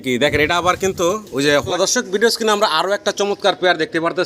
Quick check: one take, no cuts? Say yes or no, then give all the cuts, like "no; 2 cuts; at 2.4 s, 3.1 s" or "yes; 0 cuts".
no; 1 cut; at 1.7 s